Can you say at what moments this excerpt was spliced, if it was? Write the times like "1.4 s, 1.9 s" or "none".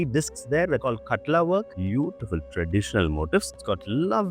1.7 s, 3.5 s